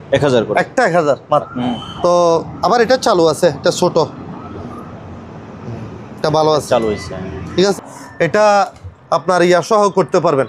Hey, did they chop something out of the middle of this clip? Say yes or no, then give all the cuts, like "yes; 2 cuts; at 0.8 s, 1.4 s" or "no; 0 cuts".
yes; 2 cuts; at 1.5 s, 7.7 s